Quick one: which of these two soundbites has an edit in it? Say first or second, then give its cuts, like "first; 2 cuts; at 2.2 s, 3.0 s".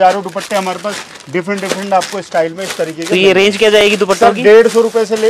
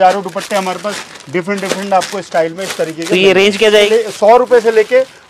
second; 1 cut; at 3.8 s